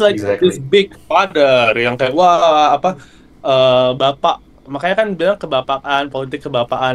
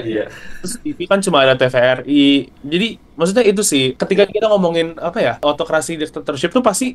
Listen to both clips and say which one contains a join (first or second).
second